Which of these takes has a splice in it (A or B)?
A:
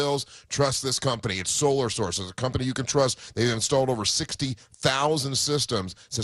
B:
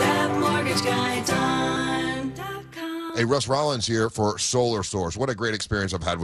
B